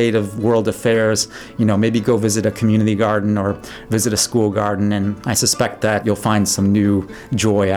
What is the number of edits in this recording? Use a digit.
2